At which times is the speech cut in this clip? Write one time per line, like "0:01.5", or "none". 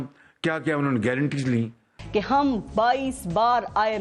0:02.0